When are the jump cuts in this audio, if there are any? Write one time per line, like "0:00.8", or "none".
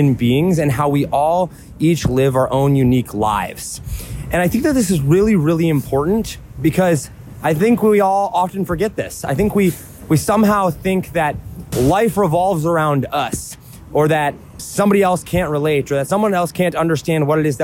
0:11.6
0:14.6